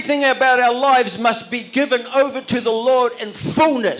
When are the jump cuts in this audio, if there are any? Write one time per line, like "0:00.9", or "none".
none